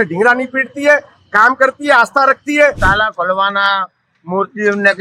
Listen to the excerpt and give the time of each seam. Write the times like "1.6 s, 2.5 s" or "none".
2.8 s